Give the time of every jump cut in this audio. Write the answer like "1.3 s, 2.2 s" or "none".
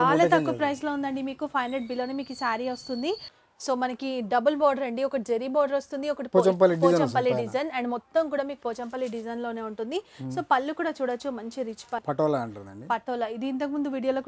3.3 s, 12.0 s